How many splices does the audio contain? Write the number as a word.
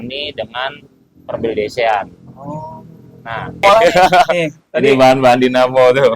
one